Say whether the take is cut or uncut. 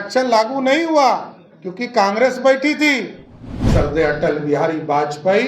cut